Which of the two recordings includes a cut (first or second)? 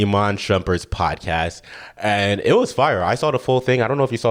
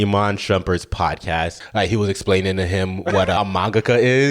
second